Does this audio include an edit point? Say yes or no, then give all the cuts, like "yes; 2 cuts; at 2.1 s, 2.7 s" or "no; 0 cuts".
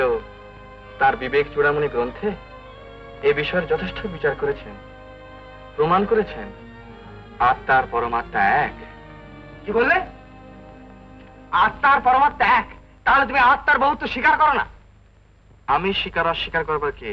no; 0 cuts